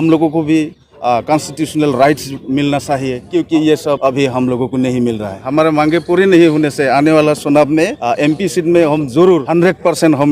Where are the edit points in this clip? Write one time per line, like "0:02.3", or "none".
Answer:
0:03.2
0:04.0
0:05.4
0:08.0
0:09.5